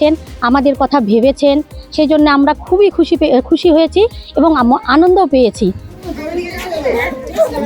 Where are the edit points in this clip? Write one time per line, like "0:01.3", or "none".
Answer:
0:05.9